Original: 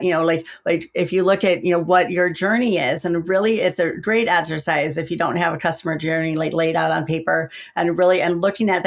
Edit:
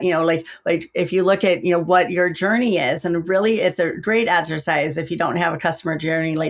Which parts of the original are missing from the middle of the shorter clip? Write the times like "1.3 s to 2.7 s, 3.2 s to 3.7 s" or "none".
none